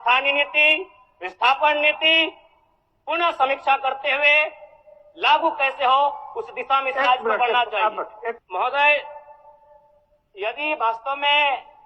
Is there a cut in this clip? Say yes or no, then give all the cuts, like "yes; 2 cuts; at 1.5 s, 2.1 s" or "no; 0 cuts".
yes; 1 cut; at 8.4 s